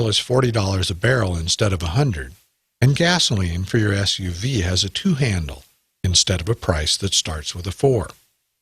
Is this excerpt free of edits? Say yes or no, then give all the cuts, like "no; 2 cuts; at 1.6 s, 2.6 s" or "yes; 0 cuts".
no; 1 cut; at 7.0 s